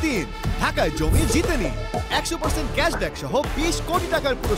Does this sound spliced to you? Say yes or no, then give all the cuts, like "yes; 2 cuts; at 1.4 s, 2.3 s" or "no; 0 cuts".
no; 0 cuts